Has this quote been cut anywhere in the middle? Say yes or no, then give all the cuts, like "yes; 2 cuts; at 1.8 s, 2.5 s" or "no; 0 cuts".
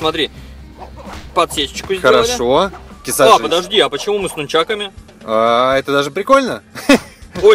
yes; 1 cut; at 3.0 s